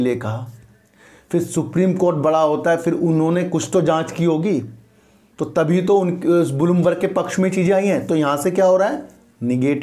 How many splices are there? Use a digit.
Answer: 0